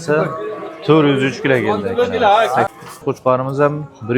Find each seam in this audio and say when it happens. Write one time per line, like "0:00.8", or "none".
0:02.7